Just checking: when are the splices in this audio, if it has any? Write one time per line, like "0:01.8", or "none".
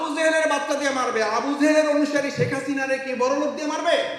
none